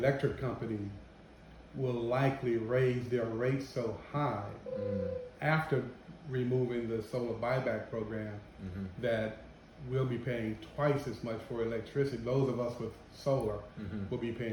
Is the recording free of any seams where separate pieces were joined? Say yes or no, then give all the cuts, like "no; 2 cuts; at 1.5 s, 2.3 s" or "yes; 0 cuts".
yes; 0 cuts